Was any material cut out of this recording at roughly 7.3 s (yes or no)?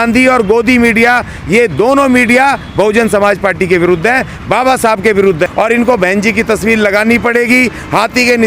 no